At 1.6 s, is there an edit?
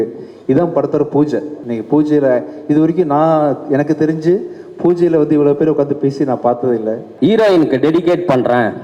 yes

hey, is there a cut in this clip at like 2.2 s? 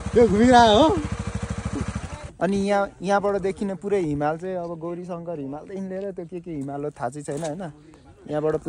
yes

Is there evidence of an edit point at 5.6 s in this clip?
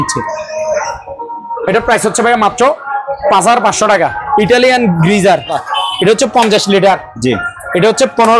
yes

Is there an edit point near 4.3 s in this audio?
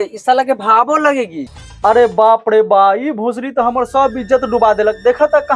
no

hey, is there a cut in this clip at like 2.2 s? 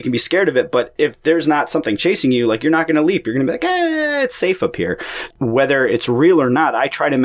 no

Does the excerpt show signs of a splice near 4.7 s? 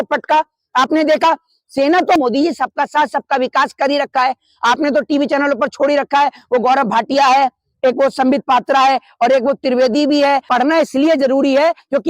no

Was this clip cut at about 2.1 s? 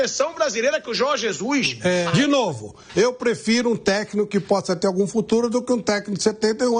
yes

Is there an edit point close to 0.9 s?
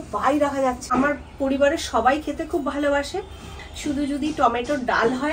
yes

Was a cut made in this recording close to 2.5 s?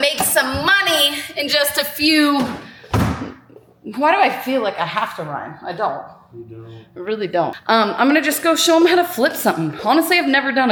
no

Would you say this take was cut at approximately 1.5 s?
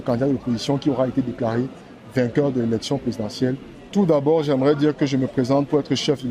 no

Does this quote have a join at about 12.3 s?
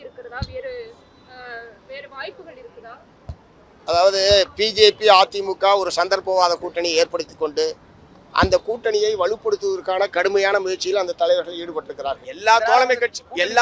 yes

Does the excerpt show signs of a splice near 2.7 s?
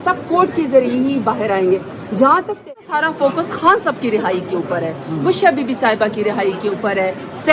yes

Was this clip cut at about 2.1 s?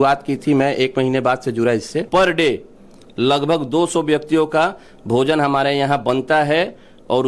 yes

